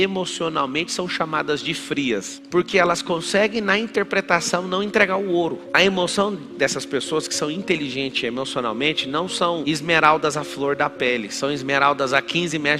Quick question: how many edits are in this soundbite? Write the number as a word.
one